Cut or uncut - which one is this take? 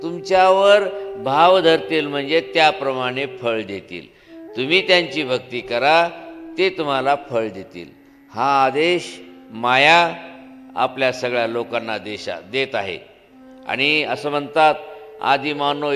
uncut